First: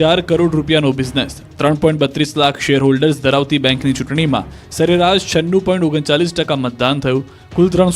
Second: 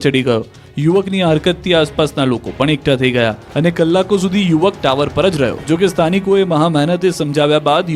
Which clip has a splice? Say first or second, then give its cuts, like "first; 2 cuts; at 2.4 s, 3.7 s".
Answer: first; 1 cut; at 4.6 s